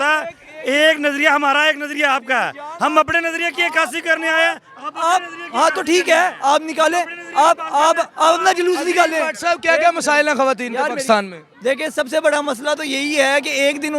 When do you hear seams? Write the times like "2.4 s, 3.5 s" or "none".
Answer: none